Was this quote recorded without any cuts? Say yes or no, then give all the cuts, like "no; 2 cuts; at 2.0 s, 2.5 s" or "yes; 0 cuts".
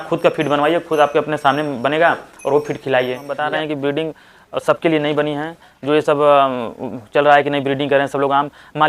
no; 1 cut; at 3.3 s